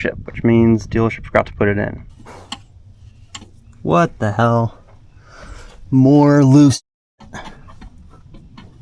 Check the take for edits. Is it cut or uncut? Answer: cut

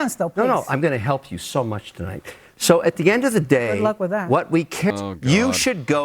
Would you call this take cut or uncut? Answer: cut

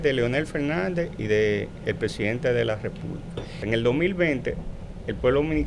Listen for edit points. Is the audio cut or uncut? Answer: cut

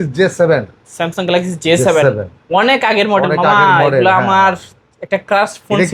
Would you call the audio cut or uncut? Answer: uncut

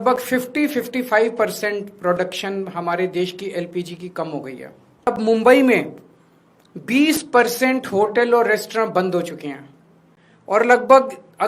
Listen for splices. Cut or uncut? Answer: cut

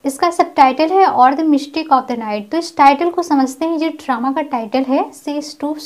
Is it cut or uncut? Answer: uncut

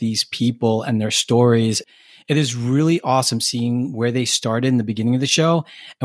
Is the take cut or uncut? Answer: cut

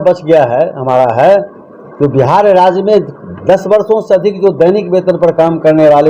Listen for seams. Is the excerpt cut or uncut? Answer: uncut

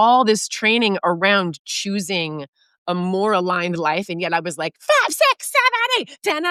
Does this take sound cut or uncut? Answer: uncut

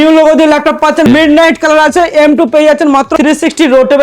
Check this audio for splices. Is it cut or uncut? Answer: cut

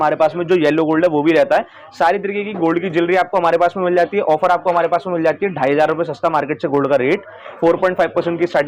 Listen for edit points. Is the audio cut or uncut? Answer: uncut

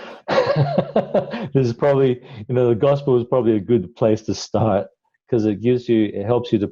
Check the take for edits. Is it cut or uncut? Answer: uncut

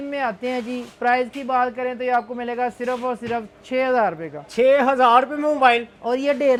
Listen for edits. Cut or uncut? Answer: uncut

